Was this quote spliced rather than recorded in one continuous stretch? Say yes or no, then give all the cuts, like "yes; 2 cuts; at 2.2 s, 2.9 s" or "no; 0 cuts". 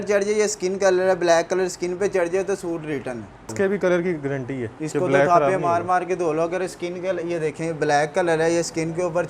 yes; 1 cut; at 3.5 s